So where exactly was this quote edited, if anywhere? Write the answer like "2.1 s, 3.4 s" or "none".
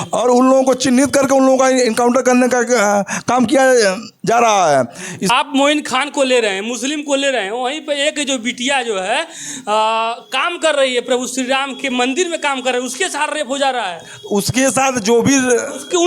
5.3 s